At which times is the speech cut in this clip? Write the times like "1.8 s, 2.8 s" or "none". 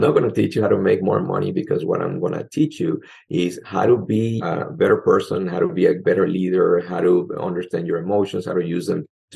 4.4 s, 6.0 s, 7.3 s